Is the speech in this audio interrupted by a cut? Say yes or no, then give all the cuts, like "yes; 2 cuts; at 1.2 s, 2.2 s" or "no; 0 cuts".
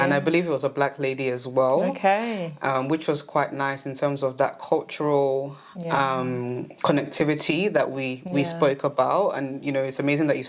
no; 0 cuts